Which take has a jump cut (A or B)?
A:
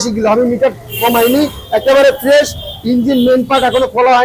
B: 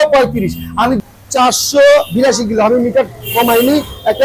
B